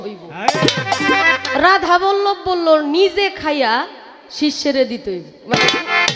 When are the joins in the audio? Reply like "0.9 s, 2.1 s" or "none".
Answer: none